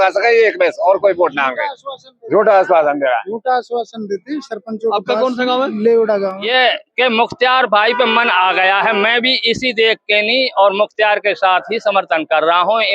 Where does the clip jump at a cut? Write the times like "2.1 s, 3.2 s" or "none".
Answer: 6.4 s

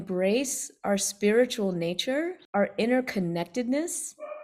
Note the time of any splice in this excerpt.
2.4 s

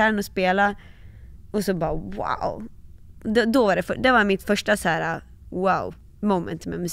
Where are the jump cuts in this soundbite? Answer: 6.0 s

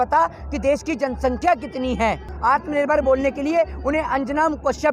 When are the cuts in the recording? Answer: 2.3 s

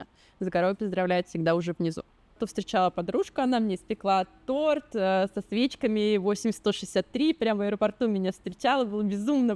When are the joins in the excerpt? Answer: 2.4 s

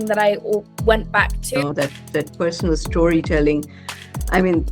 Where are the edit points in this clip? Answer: 1.6 s

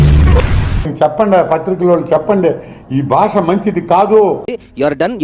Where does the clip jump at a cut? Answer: 0.9 s, 4.4 s

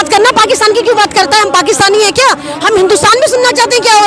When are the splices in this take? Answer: none

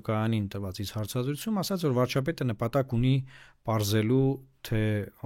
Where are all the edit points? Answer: none

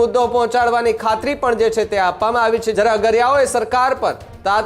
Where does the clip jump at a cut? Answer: 2.7 s

